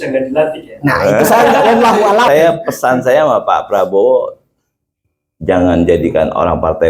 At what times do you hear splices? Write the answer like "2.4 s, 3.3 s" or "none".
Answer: 2.3 s